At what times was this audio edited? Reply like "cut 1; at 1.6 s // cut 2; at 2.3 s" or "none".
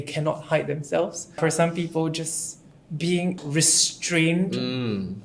cut 1; at 1.2 s // cut 2; at 3.4 s